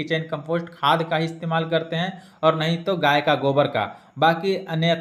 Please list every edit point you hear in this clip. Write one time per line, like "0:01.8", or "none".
none